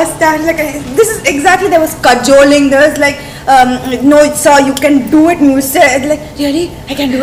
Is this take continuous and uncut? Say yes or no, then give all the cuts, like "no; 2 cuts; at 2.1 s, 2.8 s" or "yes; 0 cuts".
yes; 0 cuts